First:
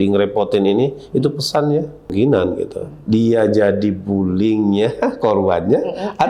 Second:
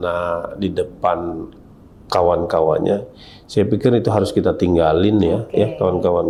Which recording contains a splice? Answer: first; 1 cut; at 2.1 s

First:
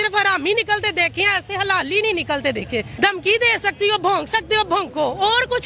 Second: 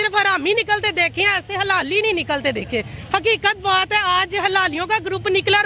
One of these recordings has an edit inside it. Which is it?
first; 1 cut; at 2.9 s

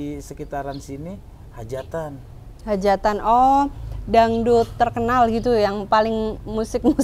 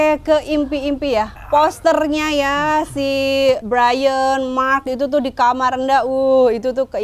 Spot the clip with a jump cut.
second; 2 cuts; at 1.3 s, 3.6 s

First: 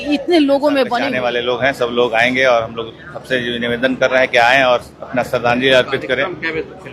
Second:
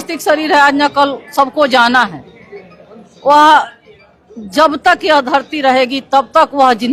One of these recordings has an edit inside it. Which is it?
first; 1 cut; at 1.0 s

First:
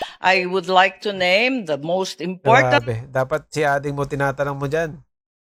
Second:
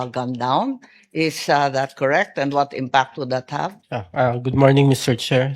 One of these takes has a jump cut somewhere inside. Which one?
second; 1 cut; at 3.8 s

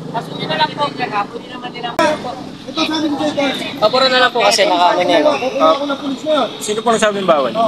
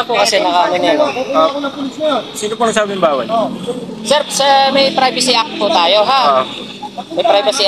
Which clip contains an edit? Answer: first; 1 cut; at 2.0 s

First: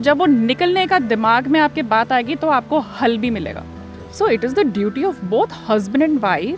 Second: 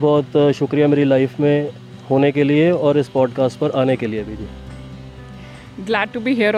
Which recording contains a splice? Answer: first; 1 cut; at 4.0 s

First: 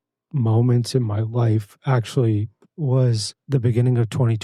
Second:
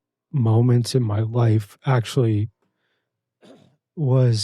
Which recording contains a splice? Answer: first; 2 cuts; at 2.6 s, 3.3 s

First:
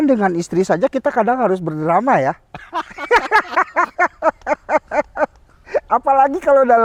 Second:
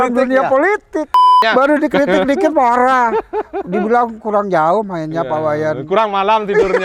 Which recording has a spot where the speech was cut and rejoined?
second; 1 cut; at 1.4 s

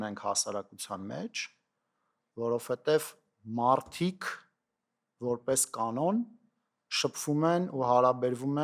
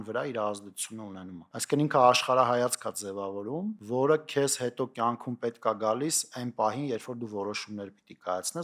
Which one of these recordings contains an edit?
second; 2 cuts; at 1.5 s, 3.8 s

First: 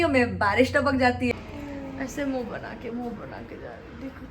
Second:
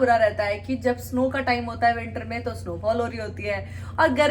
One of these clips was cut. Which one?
first; 1 cut; at 1.3 s

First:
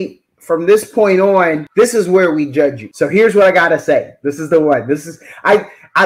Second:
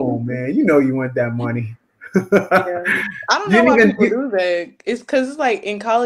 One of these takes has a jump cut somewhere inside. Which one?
first; 2 cuts; at 1.6 s, 2.8 s

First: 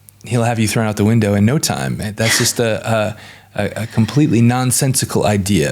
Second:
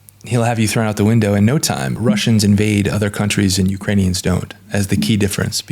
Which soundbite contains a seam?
second; 1 cut; at 2.0 s

